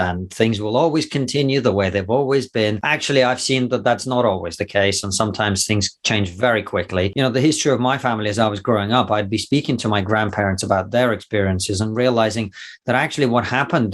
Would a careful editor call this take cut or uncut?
cut